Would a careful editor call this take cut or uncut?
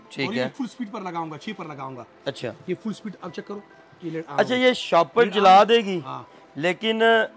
uncut